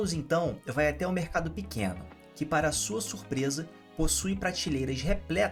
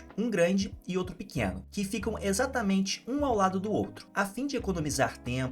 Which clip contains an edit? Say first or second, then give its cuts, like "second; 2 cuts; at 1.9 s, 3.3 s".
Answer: second; 2 cuts; at 1.6 s, 4.0 s